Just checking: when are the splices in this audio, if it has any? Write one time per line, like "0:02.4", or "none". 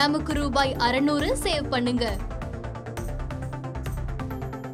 none